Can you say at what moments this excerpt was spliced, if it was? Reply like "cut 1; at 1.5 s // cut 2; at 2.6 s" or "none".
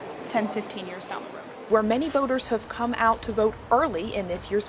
cut 1; at 1.7 s